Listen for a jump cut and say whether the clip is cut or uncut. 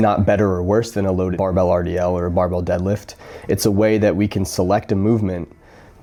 uncut